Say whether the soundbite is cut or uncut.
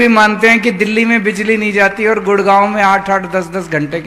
uncut